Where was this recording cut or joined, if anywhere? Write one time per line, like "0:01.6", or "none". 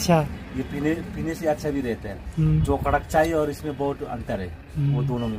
none

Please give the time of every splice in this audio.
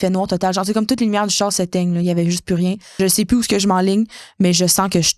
0:02.9

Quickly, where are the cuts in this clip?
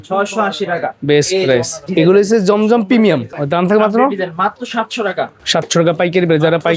0:01.8
0:03.3
0:05.4

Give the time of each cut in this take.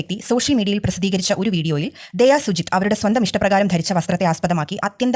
none

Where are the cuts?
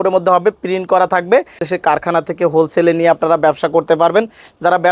0:01.6

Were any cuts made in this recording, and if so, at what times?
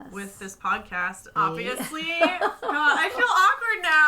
0:01.3

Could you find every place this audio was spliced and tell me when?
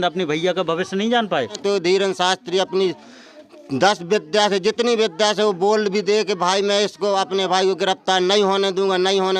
0:01.6

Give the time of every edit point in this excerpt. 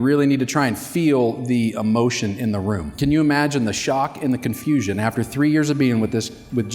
0:03.0

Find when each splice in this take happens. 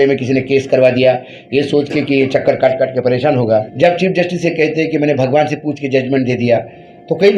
0:03.7

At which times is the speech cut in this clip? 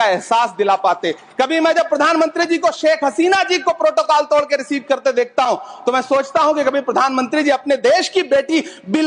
none

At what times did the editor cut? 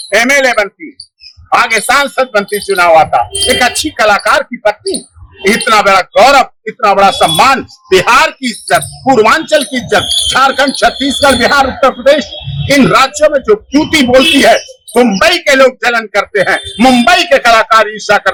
none

